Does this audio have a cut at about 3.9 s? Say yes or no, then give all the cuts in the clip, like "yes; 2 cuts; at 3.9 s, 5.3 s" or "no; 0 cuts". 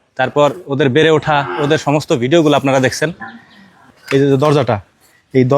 yes; 1 cut; at 3.9 s